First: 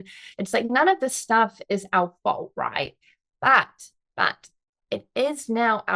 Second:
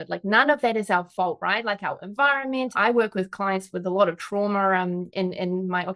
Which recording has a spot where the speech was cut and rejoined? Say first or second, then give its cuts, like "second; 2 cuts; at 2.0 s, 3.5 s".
second; 1 cut; at 2.7 s